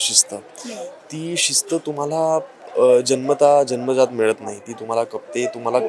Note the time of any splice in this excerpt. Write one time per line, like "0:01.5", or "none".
none